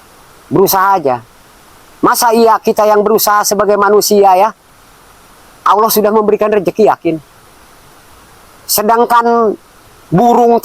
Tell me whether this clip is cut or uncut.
uncut